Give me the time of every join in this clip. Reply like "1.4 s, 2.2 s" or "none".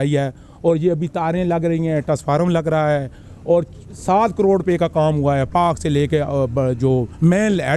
none

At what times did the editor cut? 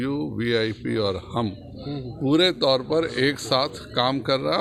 none

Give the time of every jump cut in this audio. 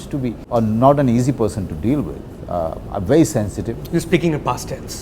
none

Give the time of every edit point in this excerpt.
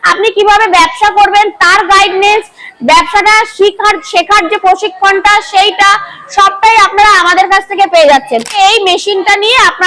8.5 s

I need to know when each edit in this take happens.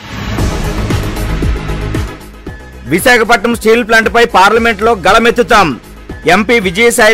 1.1 s

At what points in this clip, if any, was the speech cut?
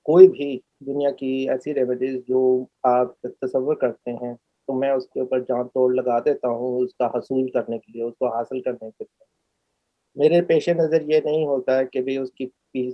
none

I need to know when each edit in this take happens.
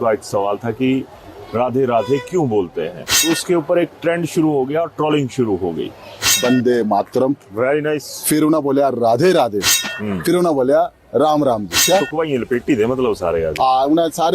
3.2 s, 6.3 s, 11.8 s

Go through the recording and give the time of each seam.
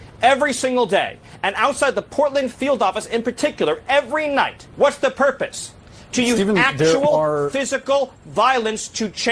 4.6 s

